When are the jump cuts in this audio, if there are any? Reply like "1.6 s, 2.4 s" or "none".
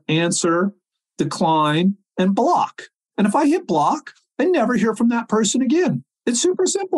0.9 s, 6.1 s